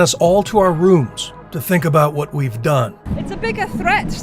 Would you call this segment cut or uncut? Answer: cut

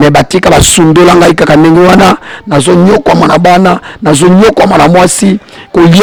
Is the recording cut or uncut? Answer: uncut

